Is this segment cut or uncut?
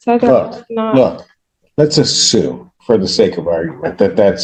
uncut